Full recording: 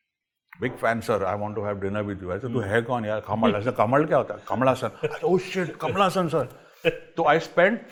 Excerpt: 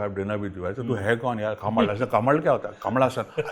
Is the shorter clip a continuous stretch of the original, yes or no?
yes